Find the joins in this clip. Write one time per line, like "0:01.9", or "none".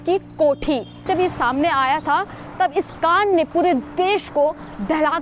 0:01.1